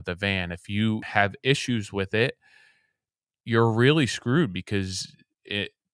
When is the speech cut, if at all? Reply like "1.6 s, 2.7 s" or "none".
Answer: 1.0 s